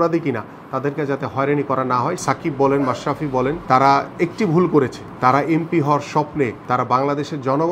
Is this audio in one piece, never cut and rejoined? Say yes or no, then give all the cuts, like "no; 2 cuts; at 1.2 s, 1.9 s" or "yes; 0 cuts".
no; 4 cuts; at 2.2 s, 3.6 s, 5.0 s, 6.6 s